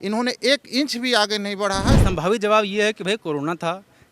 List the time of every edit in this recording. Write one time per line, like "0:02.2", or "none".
0:02.0